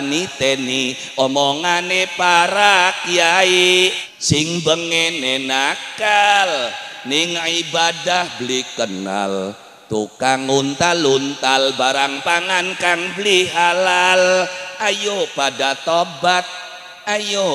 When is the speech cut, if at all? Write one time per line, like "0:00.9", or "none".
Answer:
0:04.1